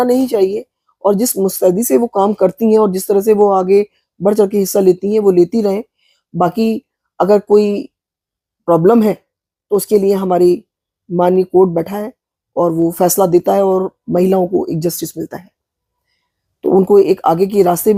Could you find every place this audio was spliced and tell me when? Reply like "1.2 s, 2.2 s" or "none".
none